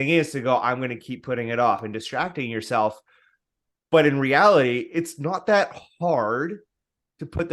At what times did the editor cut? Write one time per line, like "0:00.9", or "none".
0:01.8